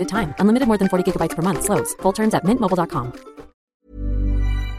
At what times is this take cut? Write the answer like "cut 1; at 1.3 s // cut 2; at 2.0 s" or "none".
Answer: cut 1; at 3.7 s